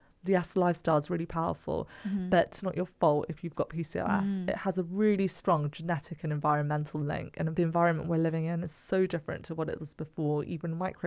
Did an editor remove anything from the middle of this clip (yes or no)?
yes